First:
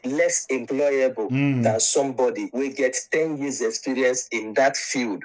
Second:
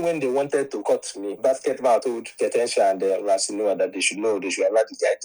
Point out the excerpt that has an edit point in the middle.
second; 2 cuts; at 1.4 s, 3.1 s

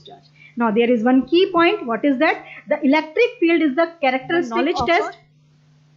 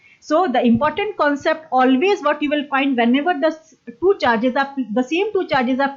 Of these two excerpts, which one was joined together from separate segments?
first; 1 cut; at 4.6 s

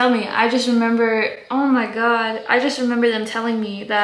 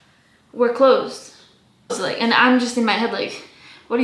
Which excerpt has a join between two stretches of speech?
second; 1 cut; at 2.0 s

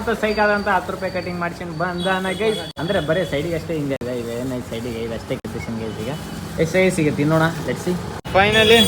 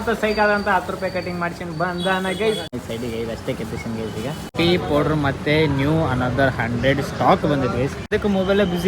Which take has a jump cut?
second; 3 cuts; at 2.7 s, 4.5 s, 8.1 s

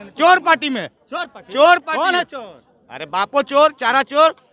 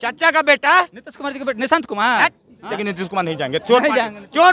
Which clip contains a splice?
second; 1 cut; at 2.8 s

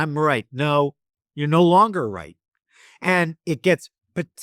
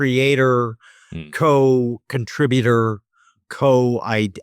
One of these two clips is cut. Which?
second; 1 cut; at 3.4 s

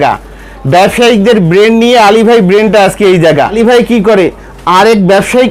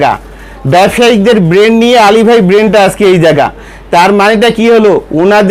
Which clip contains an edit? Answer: first; 1 cut; at 3.5 s

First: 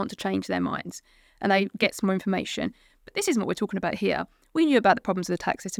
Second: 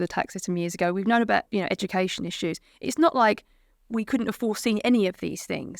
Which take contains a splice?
second; 1 cut; at 1.5 s

